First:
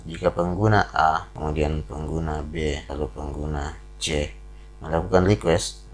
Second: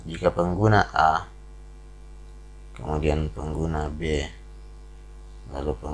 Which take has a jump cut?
first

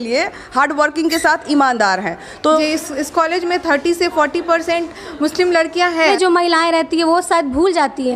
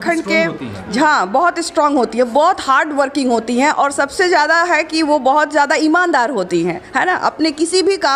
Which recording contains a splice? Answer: first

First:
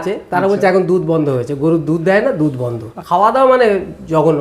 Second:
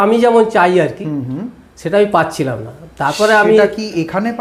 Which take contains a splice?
first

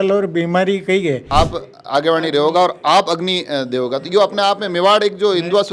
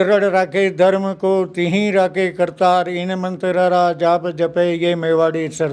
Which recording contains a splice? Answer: first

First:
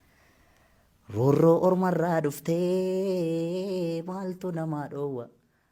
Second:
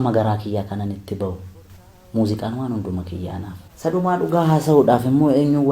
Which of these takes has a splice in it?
second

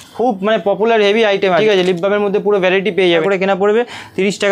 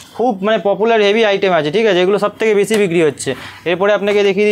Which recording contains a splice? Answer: first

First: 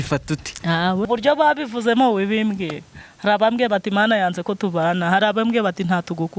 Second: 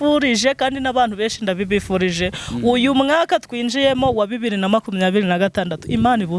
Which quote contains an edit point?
first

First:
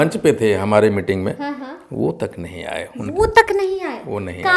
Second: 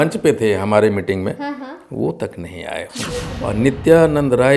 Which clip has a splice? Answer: second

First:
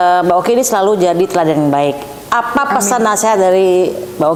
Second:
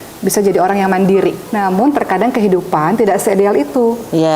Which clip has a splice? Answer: second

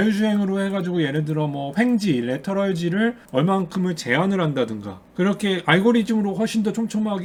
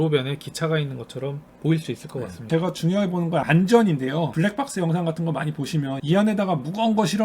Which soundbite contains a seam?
second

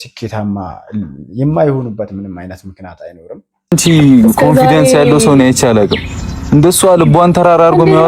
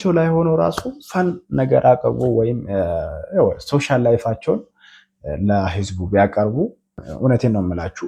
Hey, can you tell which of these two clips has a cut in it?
first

